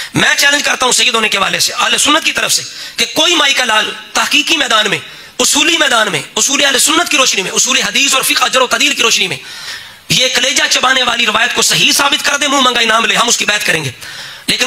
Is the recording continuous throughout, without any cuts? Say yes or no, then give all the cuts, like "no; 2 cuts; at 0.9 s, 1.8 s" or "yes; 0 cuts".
yes; 0 cuts